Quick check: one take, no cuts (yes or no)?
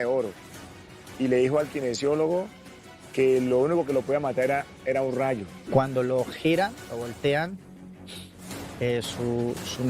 no